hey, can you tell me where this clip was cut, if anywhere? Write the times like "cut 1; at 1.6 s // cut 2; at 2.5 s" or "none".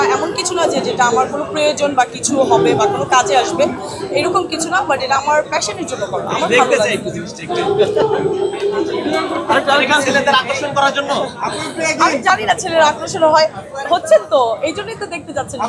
none